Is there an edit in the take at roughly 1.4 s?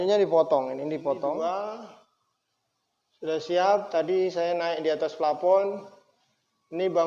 yes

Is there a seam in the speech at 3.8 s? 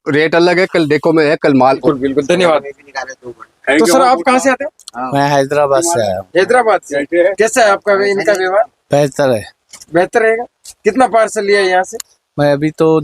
no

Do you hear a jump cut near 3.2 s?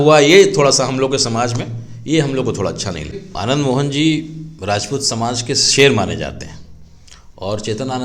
yes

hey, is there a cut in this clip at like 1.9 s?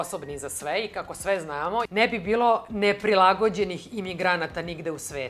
yes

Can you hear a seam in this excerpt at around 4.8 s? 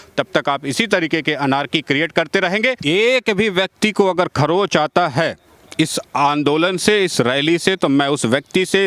no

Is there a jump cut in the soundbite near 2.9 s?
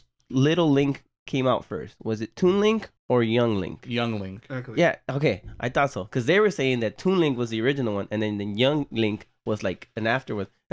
yes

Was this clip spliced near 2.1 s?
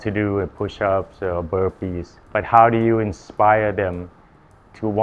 yes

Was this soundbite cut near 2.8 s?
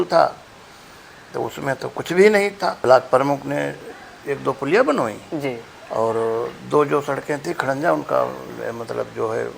yes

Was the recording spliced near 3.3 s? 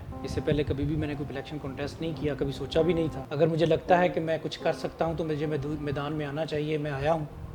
yes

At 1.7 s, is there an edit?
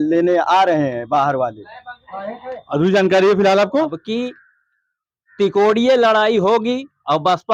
no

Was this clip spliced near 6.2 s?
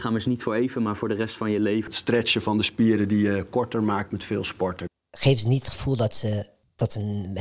no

